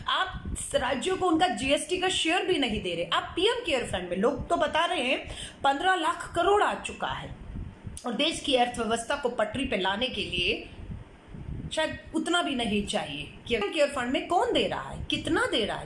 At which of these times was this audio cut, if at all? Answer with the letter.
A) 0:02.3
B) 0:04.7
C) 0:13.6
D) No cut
C